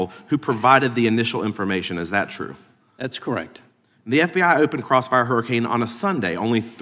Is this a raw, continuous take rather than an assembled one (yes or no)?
yes